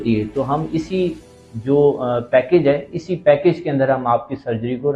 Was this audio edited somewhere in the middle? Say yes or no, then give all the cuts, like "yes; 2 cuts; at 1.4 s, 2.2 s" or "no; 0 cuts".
no; 0 cuts